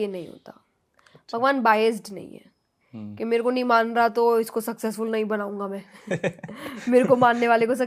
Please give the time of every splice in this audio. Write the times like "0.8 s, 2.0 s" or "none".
none